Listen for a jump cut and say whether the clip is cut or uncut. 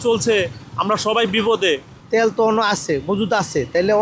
cut